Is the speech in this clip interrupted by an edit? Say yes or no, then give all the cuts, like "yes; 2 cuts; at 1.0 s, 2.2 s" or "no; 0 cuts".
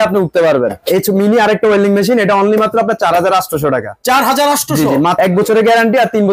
yes; 2 cuts; at 0.8 s, 5.1 s